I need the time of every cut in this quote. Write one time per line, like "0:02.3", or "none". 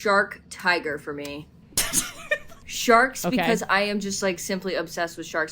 0:01.6
0:02.6